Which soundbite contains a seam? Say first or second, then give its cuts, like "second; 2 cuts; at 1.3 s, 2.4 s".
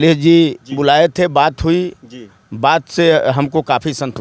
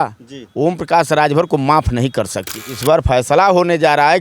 second; 1 cut; at 2.4 s